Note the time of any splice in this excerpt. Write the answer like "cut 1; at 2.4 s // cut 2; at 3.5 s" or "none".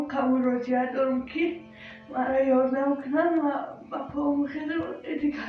none